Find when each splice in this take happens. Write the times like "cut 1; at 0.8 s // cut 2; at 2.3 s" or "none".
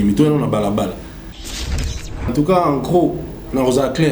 cut 1; at 1.7 s